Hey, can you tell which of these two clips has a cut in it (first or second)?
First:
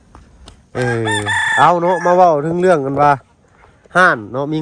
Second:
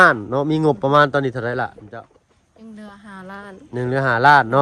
second